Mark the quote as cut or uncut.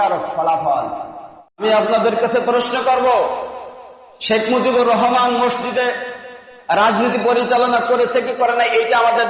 cut